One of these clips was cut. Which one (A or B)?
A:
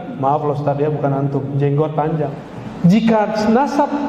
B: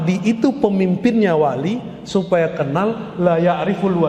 A